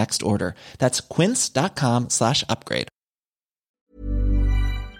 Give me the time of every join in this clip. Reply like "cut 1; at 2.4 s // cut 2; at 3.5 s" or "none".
cut 1; at 3.9 s